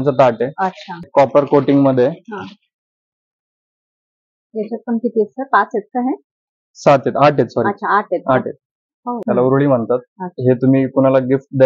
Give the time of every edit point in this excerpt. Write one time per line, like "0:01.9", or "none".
0:01.1
0:09.2